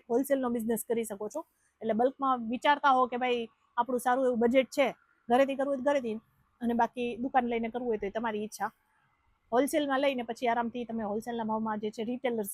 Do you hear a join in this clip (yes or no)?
no